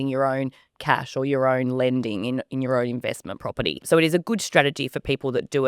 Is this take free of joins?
no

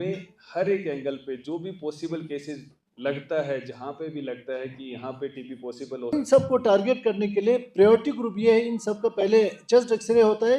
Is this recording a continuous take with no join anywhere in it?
no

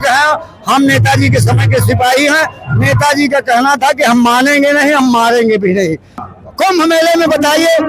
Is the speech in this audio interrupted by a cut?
yes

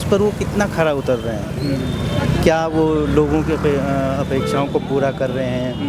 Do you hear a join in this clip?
no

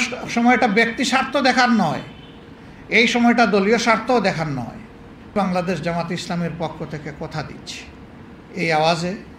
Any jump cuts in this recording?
yes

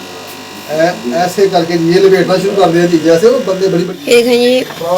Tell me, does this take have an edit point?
yes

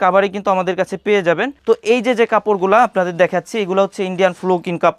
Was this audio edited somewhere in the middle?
no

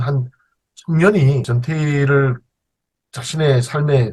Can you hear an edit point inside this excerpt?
yes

